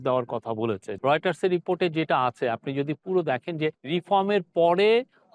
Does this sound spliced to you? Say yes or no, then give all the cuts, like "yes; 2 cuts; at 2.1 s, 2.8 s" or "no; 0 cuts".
yes; 2 cuts; at 0.9 s, 3.8 s